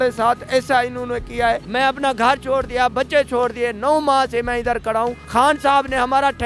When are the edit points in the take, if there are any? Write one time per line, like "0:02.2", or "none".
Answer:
0:01.6
0:05.2